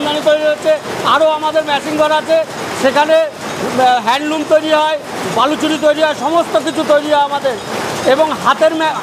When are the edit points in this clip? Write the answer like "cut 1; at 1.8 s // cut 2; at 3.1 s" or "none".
none